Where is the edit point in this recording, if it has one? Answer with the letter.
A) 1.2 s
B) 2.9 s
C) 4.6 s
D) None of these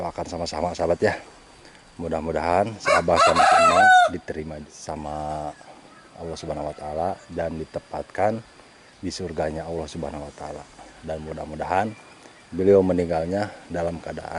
C